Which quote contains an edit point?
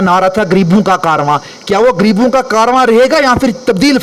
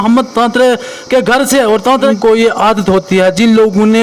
second; 1 cut; at 2.0 s

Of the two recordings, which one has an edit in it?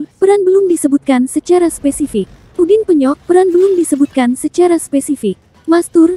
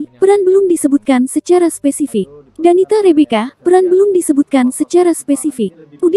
first; 1 cut; at 2.4 s

